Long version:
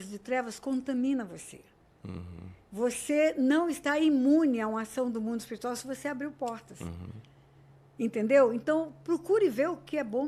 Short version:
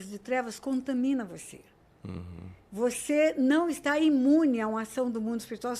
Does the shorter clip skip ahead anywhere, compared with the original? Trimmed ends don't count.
no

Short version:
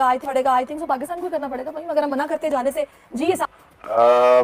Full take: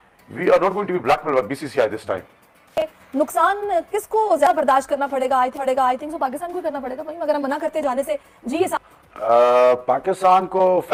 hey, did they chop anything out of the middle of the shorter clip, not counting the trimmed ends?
no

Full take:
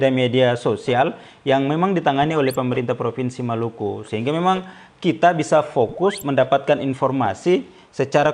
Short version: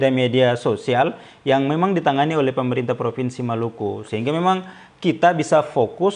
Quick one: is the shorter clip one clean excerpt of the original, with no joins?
yes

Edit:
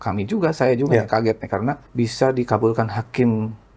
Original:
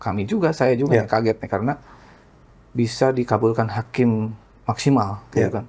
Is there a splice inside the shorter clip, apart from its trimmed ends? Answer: yes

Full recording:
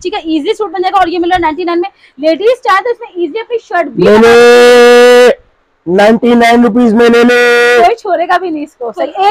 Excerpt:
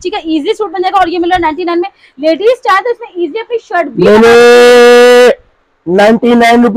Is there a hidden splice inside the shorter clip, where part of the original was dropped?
no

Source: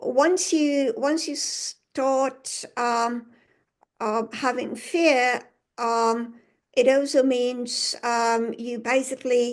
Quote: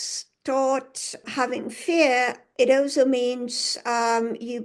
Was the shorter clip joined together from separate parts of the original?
yes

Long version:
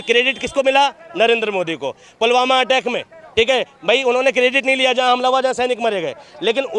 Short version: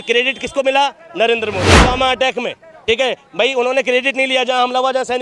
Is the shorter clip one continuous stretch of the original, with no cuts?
no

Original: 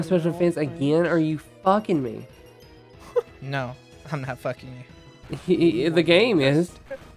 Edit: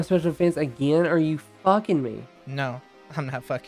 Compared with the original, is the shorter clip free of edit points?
no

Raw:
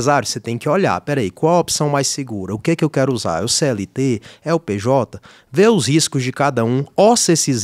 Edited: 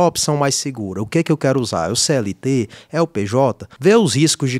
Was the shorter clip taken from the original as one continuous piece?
no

